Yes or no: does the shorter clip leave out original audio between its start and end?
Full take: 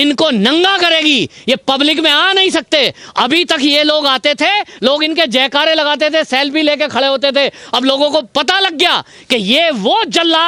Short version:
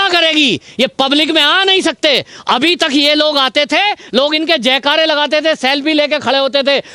no